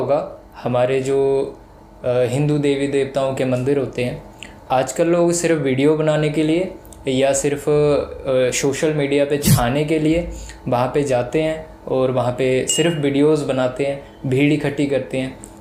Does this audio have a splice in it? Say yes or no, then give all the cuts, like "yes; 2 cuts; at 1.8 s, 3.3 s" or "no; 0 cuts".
no; 0 cuts